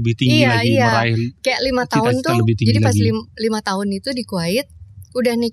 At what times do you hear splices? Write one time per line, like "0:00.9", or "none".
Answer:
none

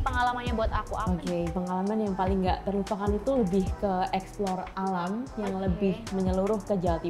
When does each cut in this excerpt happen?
none

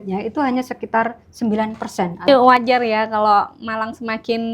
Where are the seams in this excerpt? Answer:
0:02.3

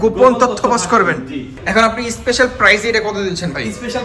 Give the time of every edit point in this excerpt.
0:01.5

